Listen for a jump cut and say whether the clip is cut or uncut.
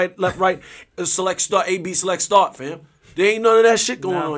uncut